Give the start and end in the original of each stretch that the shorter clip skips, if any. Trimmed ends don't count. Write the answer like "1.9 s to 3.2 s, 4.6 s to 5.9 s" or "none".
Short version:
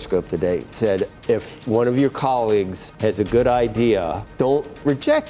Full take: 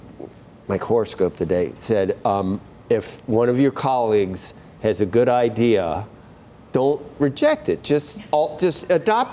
2.2 s to 2.7 s, 4.4 s to 4.6 s, 6.0 s to 6.6 s